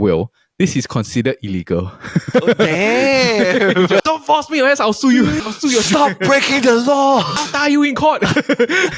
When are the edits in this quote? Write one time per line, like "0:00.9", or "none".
0:04.0
0:05.4
0:07.3